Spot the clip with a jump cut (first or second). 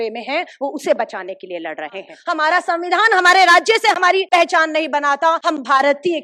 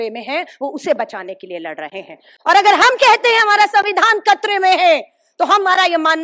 first